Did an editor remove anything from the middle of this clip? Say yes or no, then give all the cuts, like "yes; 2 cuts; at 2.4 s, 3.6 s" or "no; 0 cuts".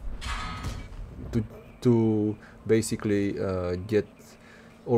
no; 0 cuts